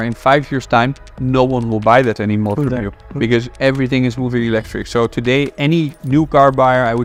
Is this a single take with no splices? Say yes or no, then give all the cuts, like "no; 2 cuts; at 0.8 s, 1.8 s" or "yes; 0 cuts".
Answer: yes; 0 cuts